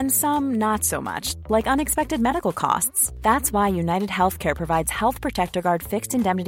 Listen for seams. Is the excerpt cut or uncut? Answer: uncut